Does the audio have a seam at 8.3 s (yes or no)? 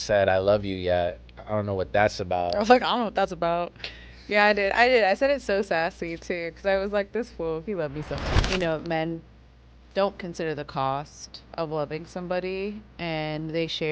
yes